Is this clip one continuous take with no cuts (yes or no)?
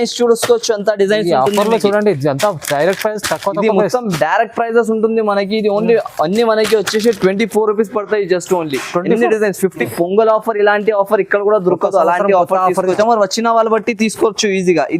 no